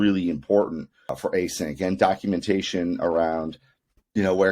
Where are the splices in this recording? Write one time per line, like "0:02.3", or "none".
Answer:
0:01.2

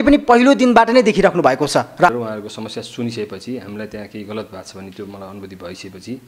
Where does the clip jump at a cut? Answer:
0:02.1

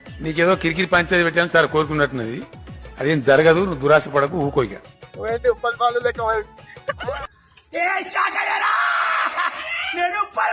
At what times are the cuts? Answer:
none

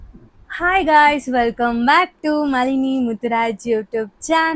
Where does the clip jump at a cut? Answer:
none

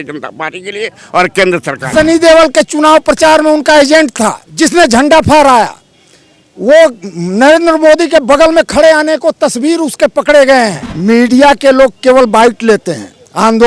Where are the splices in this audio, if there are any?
0:01.9
0:04.4
0:10.9

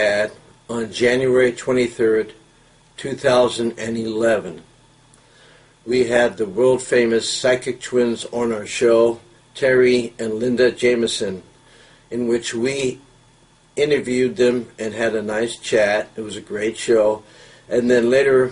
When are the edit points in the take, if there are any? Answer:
0:17.0

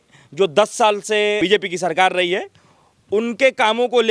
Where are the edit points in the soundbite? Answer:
0:01.4

